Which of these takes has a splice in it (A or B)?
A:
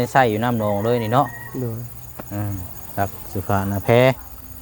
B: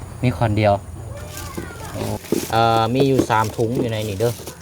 B